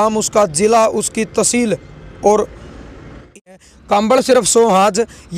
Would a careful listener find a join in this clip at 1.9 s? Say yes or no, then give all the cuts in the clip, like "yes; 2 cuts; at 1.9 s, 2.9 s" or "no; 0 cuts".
no; 1 cut; at 3.4 s